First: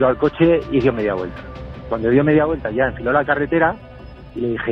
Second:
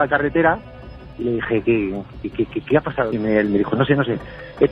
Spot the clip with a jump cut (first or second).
second